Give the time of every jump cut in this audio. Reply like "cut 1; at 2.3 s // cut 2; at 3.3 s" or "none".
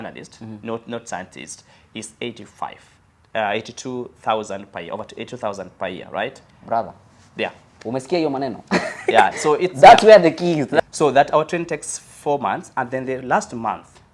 cut 1; at 10.7 s

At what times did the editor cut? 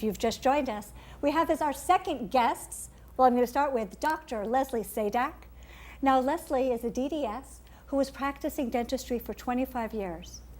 cut 1; at 9.1 s

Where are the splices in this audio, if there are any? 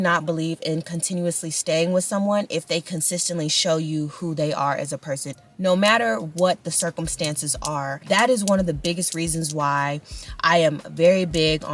none

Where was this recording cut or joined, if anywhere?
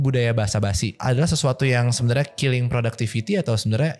cut 1; at 0.9 s

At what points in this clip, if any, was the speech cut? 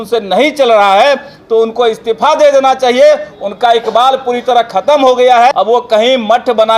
cut 1; at 5.5 s

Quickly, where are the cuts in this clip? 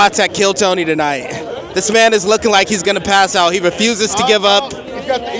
cut 1; at 1.6 s

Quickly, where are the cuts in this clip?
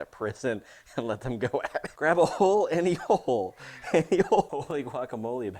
cut 1; at 1.9 s // cut 2; at 4.5 s

